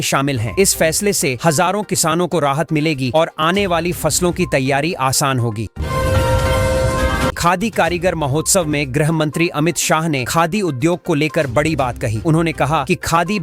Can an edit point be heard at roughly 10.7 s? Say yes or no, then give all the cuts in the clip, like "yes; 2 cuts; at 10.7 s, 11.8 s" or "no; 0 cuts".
no; 2 cuts; at 5.7 s, 7.4 s